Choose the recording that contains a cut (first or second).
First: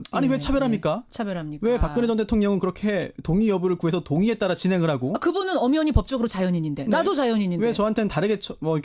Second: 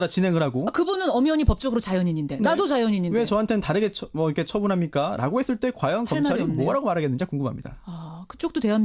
second